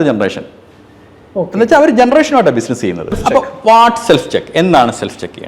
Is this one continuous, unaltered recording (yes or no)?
no